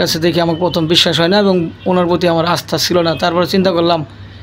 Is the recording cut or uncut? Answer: uncut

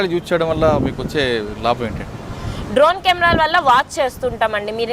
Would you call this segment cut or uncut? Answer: uncut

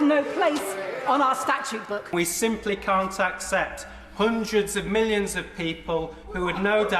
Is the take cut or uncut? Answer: cut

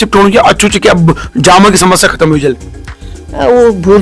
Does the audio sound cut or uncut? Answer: uncut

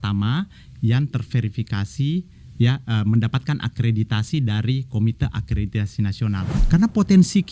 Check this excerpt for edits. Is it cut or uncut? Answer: cut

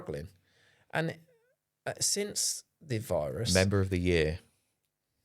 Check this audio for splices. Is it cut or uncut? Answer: cut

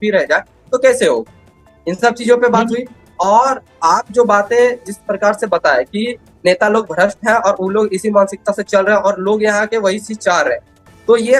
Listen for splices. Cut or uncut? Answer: uncut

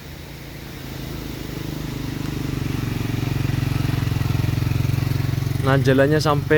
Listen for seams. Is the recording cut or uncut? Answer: uncut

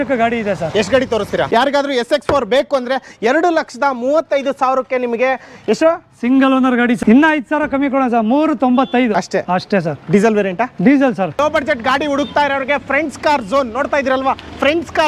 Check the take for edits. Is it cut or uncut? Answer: cut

